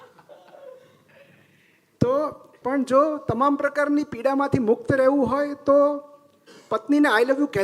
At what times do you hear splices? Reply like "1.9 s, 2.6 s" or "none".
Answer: 2.5 s